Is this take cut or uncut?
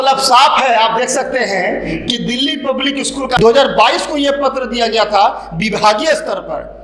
cut